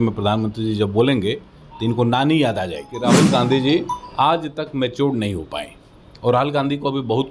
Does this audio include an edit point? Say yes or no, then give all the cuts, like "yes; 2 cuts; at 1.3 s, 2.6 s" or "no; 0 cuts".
yes; 1 cut; at 3.1 s